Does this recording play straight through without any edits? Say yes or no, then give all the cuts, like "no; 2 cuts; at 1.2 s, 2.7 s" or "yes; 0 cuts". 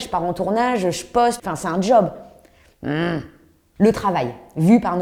yes; 0 cuts